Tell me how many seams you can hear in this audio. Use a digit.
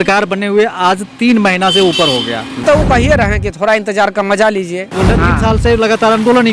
2